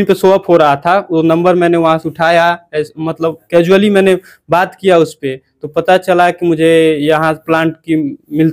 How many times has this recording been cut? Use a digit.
0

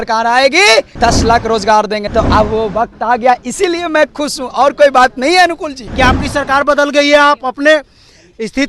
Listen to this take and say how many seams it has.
3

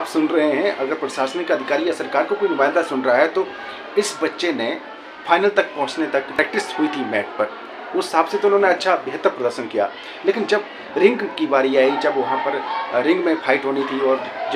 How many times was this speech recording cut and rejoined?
0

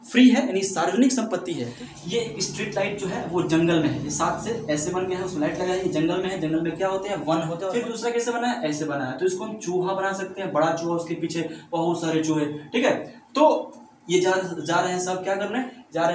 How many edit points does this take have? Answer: 2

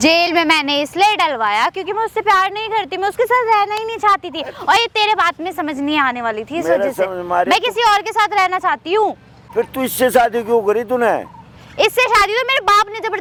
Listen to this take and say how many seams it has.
0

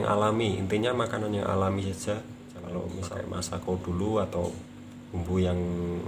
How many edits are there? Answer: 1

